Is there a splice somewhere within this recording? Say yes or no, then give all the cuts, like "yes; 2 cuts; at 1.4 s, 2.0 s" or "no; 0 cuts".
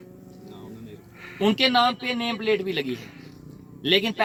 no; 0 cuts